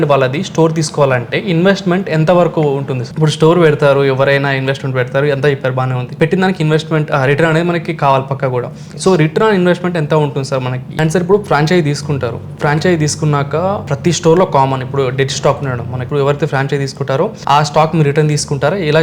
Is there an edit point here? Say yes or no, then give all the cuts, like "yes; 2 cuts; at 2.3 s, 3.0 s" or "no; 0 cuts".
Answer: yes; 6 cuts; at 3.0 s, 6.1 s, 10.9 s, 13.9 s, 16.0 s, 17.4 s